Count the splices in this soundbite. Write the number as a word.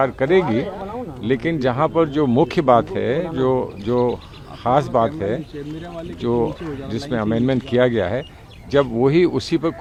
zero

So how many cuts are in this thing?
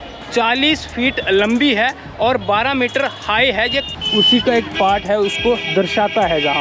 one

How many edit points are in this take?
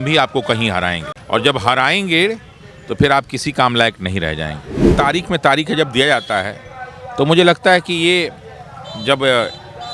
two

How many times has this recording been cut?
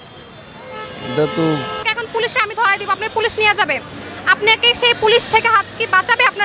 one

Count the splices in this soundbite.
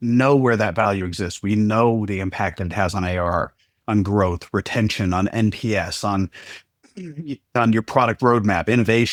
zero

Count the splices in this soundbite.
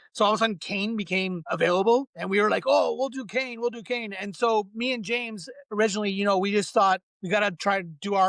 three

